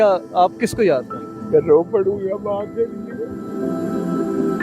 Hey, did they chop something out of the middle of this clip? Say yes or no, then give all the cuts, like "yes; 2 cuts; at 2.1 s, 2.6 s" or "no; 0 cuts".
yes; 1 cut; at 3.4 s